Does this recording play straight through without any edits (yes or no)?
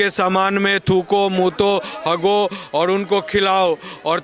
yes